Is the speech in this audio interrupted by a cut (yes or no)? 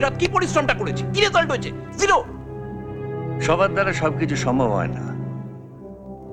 no